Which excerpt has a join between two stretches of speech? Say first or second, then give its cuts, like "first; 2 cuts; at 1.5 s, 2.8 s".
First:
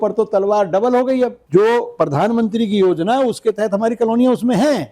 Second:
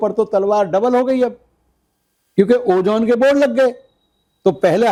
first; 1 cut; at 1.4 s